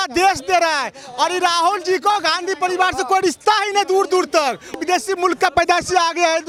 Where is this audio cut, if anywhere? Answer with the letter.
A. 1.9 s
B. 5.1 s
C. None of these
C